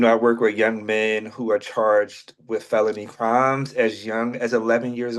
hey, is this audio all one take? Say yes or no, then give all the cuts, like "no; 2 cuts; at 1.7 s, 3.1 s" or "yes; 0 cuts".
yes; 0 cuts